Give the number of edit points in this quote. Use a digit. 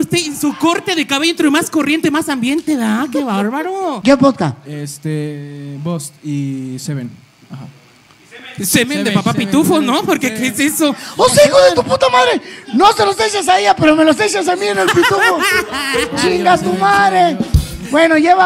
1